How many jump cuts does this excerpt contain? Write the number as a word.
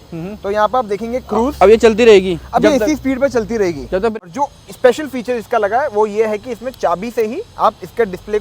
one